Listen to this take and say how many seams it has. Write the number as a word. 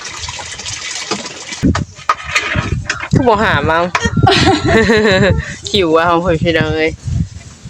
one